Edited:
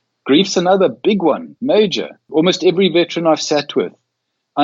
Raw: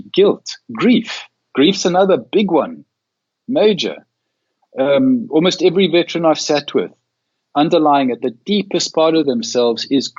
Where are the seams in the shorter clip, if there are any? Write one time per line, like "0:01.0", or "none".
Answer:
0:01.5
0:02.3